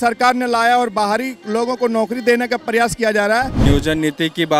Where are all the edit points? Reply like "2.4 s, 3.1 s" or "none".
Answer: 3.7 s